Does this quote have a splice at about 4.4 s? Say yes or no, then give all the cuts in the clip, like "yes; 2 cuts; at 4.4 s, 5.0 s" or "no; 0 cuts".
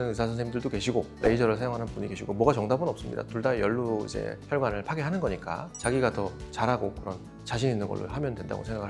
no; 0 cuts